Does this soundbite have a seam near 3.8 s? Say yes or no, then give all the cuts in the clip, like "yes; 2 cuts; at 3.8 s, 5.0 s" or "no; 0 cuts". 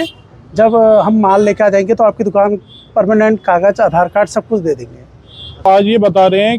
no; 1 cut; at 5.7 s